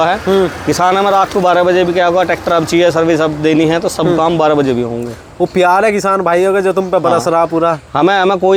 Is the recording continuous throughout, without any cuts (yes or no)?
yes